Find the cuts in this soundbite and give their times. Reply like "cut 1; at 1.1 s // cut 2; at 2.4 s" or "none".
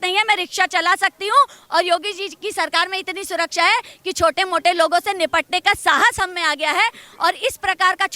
none